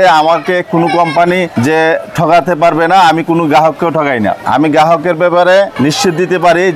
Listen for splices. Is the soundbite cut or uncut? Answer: cut